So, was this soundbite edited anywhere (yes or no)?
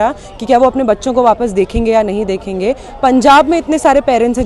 no